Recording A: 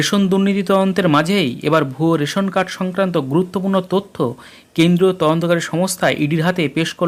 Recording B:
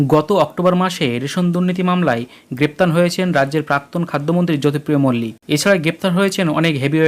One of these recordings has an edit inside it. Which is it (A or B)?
B